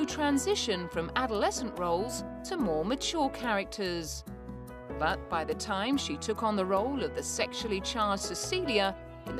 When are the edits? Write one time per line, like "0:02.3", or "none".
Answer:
none